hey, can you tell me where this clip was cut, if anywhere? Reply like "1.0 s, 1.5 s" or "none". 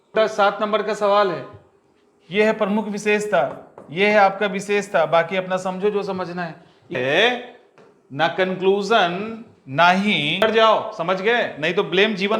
7.0 s, 10.4 s